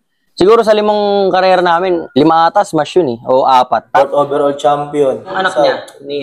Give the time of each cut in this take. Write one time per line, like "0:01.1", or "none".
0:03.8
0:05.3